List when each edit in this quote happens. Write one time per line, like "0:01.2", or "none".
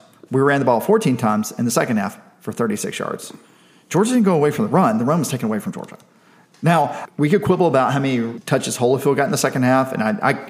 0:07.0
0:08.4